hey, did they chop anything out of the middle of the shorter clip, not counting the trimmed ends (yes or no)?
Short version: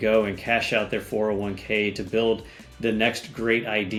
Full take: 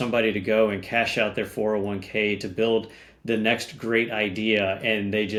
no